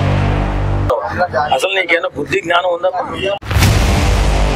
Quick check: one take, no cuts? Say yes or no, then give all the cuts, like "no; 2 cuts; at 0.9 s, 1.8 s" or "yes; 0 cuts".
no; 2 cuts; at 0.9 s, 3.4 s